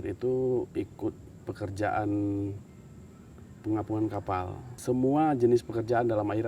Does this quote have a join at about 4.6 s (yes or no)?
yes